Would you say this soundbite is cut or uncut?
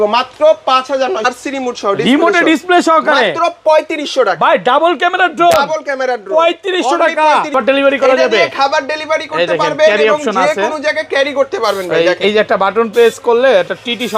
cut